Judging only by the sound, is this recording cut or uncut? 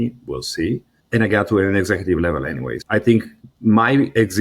cut